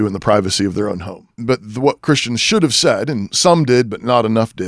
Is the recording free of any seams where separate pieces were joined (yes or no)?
no